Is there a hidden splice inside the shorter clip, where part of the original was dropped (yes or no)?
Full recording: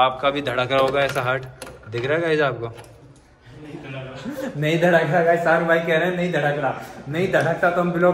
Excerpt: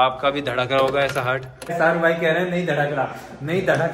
yes